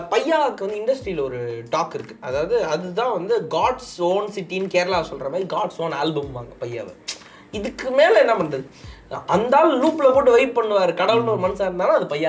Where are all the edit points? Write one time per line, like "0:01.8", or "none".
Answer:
none